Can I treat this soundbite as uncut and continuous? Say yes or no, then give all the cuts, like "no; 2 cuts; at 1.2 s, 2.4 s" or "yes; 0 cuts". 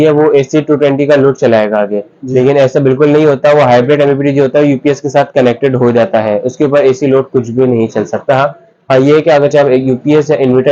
yes; 0 cuts